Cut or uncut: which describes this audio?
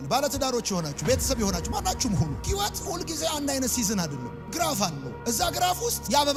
uncut